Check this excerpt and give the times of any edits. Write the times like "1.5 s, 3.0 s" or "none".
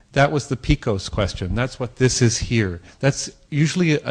2.6 s